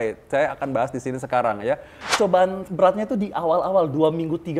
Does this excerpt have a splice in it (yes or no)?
yes